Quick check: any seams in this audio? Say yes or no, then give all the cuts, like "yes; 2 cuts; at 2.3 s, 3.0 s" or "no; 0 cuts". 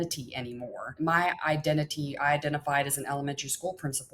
yes; 1 cut; at 1.0 s